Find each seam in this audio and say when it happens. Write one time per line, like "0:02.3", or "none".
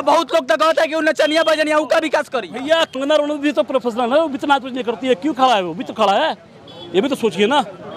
0:02.9